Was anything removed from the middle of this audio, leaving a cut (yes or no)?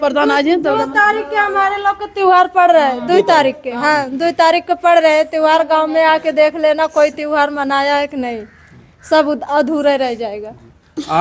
no